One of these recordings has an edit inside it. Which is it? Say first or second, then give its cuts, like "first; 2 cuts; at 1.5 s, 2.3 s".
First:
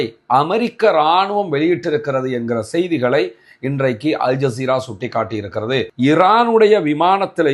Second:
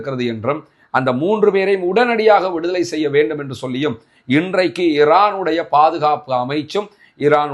first; 1 cut; at 5.9 s